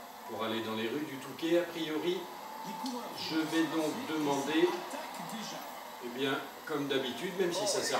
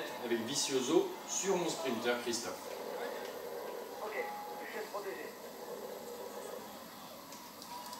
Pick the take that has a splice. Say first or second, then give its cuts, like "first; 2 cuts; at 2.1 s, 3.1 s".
first; 1 cut; at 4.0 s